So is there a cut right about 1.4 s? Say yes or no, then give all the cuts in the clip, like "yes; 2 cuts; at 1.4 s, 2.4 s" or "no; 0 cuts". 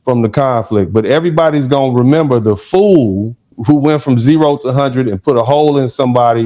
no; 1 cut; at 3.6 s